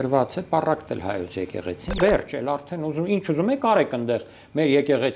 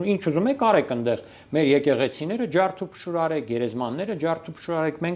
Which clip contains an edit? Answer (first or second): first